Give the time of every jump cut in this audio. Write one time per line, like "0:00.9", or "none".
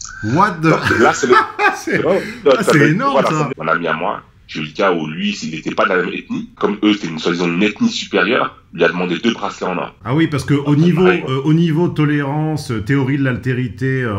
0:03.5
0:06.6
0:10.0